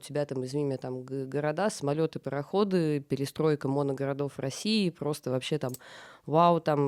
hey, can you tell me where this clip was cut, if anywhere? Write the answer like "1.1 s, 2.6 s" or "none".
none